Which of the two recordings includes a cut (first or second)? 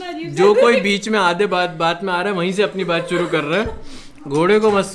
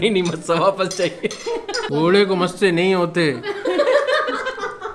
second